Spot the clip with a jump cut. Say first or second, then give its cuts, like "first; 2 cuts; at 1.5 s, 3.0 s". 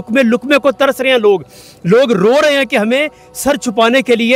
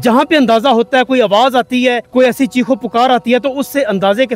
second; 1 cut; at 2.0 s